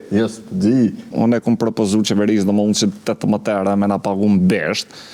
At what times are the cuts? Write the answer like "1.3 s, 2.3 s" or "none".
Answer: 1.1 s